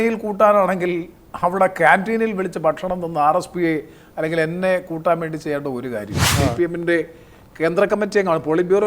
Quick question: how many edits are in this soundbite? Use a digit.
1